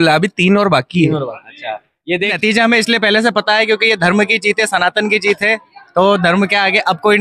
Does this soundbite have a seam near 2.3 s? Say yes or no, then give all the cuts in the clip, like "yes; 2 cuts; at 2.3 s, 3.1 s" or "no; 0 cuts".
yes; 1 cut; at 2.3 s